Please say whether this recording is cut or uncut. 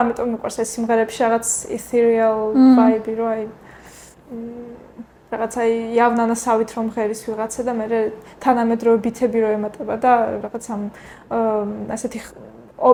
uncut